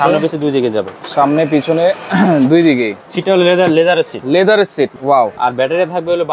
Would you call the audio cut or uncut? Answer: cut